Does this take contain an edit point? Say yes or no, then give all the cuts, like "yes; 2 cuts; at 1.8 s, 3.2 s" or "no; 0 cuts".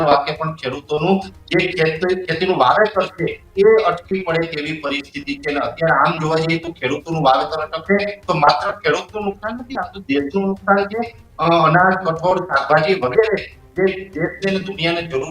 no; 0 cuts